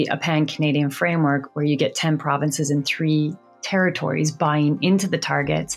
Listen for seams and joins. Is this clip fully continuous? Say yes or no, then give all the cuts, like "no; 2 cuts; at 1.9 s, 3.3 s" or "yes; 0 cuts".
yes; 0 cuts